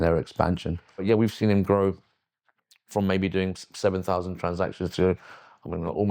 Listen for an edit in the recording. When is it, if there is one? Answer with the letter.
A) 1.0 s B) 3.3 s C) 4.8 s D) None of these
A